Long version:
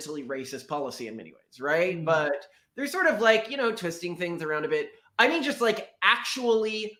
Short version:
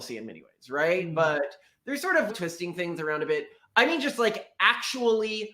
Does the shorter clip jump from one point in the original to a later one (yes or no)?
yes